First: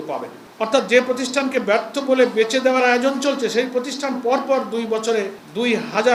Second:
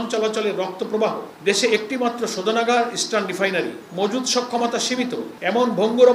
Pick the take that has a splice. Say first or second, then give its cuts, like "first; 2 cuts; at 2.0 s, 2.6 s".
second; 3 cuts; at 1.3 s, 3.8 s, 5.3 s